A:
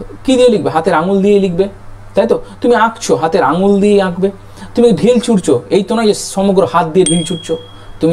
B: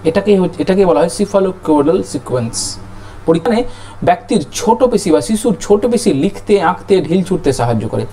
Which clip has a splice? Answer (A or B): B